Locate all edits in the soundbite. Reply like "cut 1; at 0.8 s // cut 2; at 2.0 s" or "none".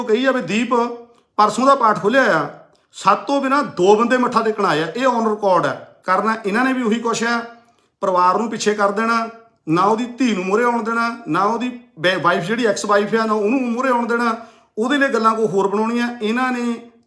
cut 1; at 5.9 s